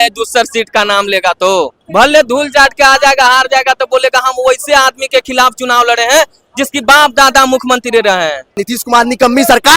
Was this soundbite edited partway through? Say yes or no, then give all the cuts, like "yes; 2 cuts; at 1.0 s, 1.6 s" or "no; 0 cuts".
yes; 2 cuts; at 1.8 s, 8.6 s